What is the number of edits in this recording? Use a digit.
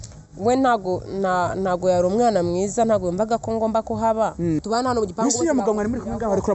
1